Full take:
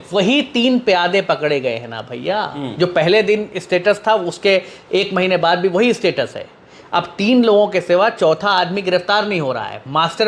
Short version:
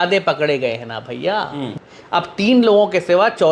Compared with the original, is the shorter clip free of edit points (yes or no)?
no